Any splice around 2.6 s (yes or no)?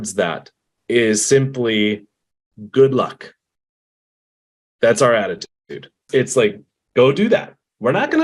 no